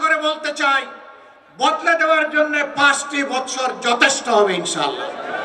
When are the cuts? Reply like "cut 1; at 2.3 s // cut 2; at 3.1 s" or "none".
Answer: none